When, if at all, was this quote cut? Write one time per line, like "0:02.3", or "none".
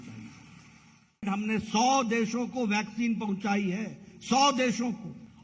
0:01.2